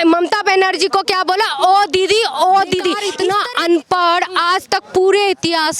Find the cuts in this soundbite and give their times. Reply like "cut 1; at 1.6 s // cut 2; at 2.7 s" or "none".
cut 1; at 3.1 s